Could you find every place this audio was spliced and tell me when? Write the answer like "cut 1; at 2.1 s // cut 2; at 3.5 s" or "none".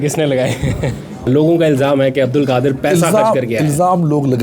cut 1; at 1.3 s

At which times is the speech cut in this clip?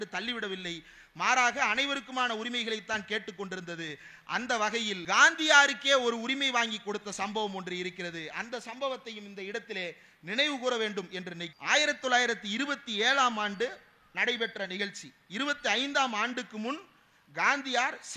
none

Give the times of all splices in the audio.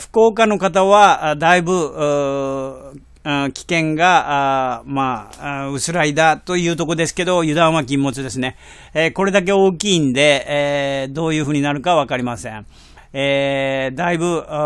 none

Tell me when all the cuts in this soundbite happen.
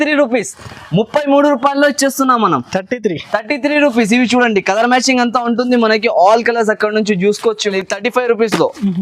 cut 1; at 7.7 s

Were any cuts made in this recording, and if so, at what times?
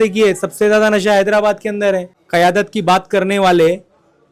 cut 1; at 2.1 s

